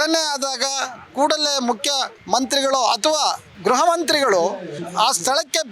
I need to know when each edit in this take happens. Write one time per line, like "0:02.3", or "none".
0:02.1
0:04.8